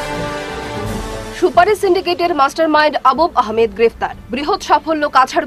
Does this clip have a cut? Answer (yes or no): yes